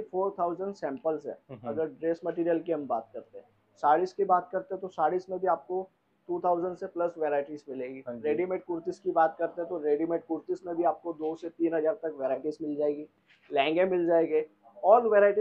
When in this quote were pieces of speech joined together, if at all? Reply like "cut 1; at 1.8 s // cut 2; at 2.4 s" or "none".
none